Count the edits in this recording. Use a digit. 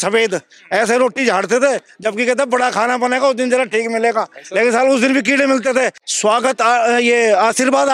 1